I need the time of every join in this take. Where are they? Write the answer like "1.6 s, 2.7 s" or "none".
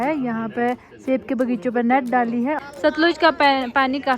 2.6 s